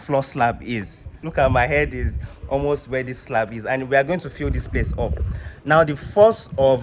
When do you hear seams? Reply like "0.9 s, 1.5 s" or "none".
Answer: 1.2 s